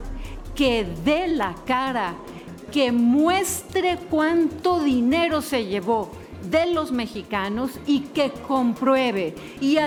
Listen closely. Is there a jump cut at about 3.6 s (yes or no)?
no